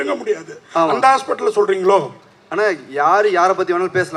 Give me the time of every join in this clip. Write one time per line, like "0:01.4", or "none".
none